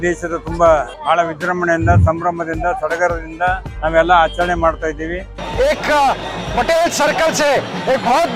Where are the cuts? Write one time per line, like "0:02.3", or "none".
0:00.9
0:03.7
0:05.4